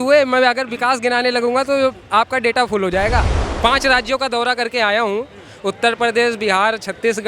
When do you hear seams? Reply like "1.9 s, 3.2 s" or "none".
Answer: 3.4 s